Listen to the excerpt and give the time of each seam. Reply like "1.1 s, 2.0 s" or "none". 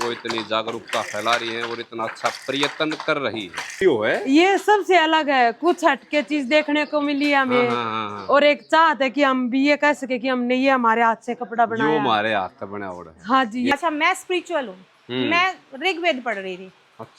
3.8 s, 13.7 s